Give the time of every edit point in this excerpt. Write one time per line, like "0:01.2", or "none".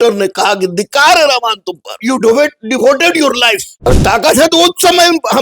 0:02.0
0:03.7